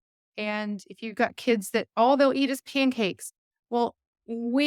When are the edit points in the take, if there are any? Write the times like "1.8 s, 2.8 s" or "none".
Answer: none